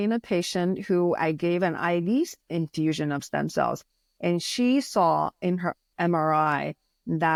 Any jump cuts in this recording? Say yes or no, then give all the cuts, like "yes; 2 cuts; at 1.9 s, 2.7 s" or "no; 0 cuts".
no; 0 cuts